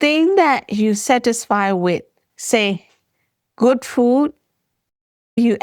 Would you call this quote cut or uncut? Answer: cut